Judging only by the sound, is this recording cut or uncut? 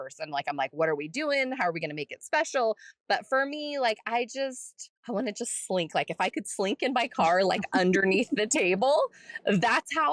uncut